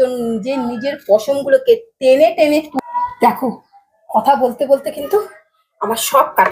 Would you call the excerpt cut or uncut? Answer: cut